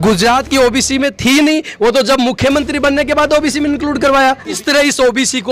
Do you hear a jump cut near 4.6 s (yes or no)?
yes